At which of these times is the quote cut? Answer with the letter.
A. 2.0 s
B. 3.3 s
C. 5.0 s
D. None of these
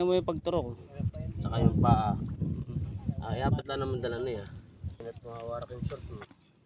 C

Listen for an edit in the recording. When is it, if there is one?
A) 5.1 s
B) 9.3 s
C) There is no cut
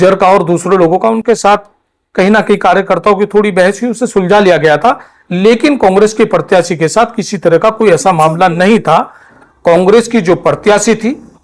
B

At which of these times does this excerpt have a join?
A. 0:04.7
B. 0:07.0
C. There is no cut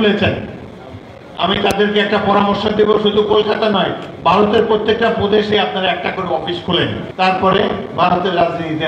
B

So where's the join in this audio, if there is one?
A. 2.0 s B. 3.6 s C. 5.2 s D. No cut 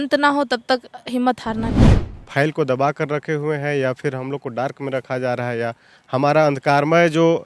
A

